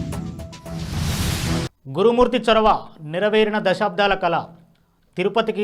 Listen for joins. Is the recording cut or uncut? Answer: cut